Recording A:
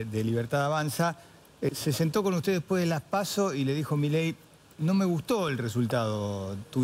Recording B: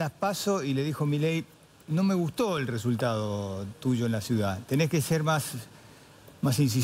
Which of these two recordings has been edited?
A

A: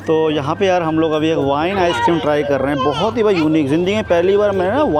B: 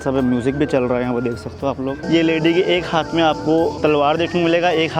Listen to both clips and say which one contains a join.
B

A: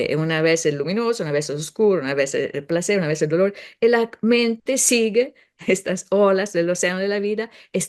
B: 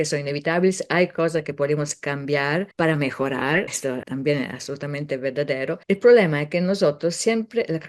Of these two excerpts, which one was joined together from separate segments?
B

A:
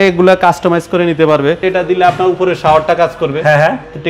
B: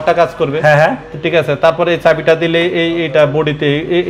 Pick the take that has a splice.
A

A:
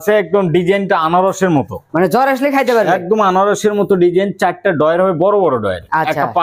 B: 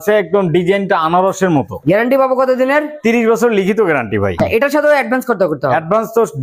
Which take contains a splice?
B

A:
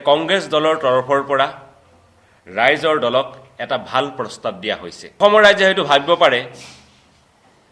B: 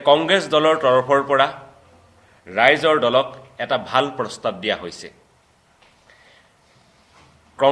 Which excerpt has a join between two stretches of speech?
A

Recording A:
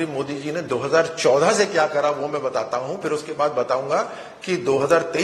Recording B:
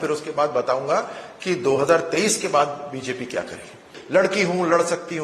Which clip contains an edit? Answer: B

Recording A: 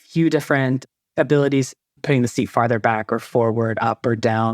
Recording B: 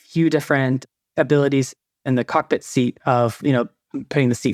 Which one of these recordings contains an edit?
A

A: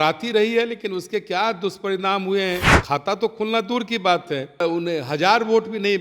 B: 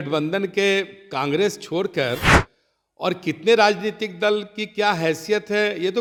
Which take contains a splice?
A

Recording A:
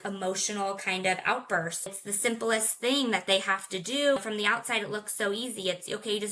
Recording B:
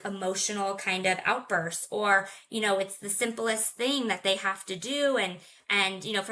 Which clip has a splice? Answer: A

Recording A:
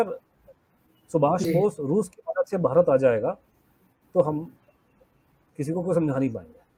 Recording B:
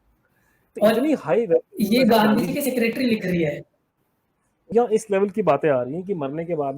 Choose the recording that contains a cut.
B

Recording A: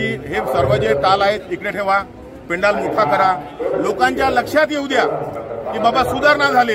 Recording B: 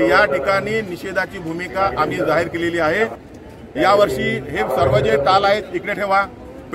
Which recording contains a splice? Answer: B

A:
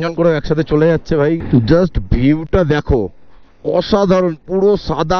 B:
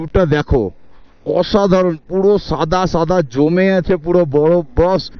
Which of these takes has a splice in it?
A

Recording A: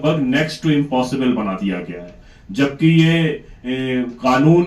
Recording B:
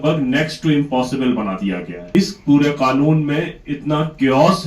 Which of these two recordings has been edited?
B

